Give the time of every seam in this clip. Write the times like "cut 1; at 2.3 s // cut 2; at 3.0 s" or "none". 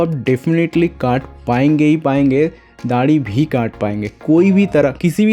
none